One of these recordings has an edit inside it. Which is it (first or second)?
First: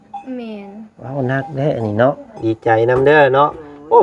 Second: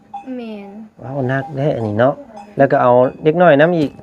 first